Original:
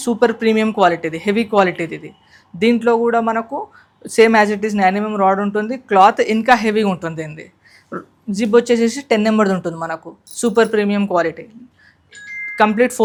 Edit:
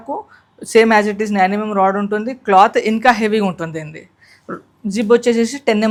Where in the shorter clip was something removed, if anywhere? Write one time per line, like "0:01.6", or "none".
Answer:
none

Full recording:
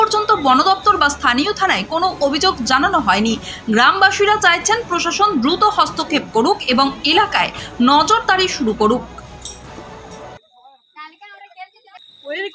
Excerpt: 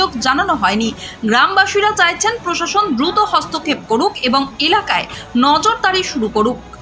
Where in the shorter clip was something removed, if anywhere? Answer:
none

